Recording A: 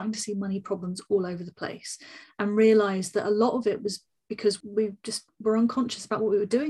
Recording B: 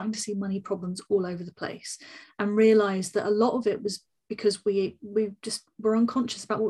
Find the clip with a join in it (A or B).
A